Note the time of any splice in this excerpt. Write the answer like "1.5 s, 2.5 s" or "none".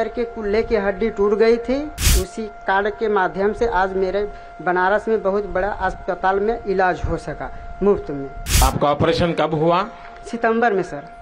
2.1 s, 8.6 s

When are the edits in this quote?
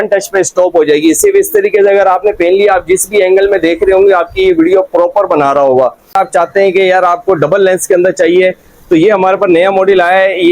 6.1 s

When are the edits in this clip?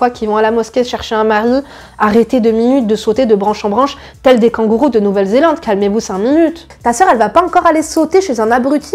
6.7 s

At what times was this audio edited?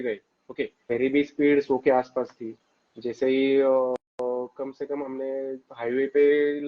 0.9 s

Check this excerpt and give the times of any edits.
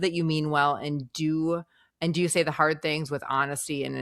none

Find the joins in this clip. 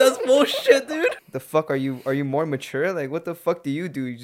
1.2 s

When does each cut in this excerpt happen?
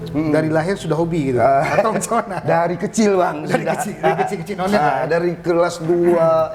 none

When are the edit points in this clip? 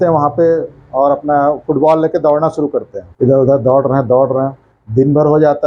3.0 s

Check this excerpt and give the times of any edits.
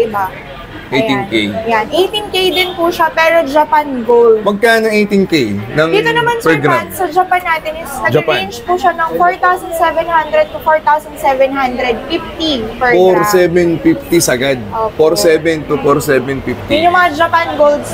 none

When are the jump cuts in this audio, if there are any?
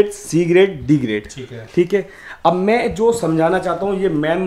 none

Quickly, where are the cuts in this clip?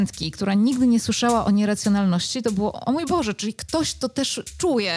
none

